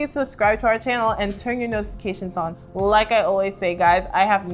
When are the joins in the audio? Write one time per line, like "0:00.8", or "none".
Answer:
none